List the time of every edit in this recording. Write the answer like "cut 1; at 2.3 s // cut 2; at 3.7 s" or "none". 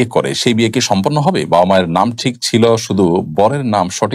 none